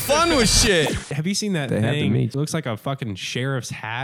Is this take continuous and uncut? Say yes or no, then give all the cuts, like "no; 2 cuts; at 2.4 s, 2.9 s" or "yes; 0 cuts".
no; 2 cuts; at 1.1 s, 2.3 s